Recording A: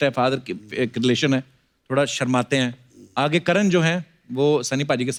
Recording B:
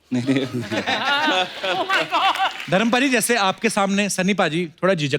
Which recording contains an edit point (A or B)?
B